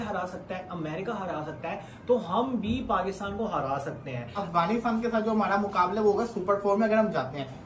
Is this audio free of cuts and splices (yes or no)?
no